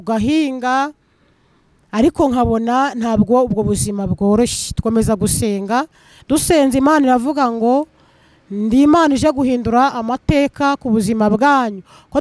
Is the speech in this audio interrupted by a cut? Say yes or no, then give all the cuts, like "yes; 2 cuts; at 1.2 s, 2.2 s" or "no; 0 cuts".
no; 0 cuts